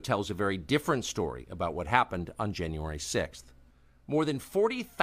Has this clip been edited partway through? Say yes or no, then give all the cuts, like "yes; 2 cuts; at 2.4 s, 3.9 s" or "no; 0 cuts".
yes; 1 cut; at 1.9 s